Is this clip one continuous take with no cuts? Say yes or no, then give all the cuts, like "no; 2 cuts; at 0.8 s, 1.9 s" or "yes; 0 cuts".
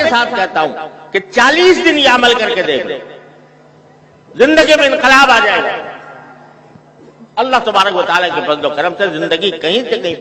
yes; 0 cuts